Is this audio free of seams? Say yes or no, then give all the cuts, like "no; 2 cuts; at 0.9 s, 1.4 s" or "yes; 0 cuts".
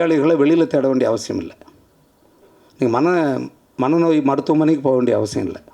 yes; 0 cuts